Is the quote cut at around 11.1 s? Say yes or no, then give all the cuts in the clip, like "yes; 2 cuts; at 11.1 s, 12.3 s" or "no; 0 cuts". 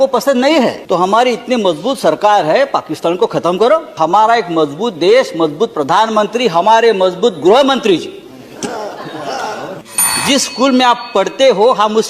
no; 3 cuts; at 0.8 s, 4.0 s, 9.9 s